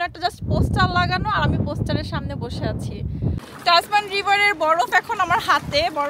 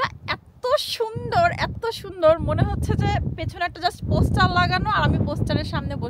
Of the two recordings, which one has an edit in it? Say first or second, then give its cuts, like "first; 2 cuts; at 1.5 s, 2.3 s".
first; 1 cut; at 3.4 s